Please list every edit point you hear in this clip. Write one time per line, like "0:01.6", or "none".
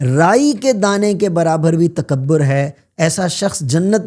none